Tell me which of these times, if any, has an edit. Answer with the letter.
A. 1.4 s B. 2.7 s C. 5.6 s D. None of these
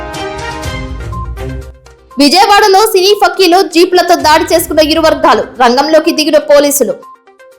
A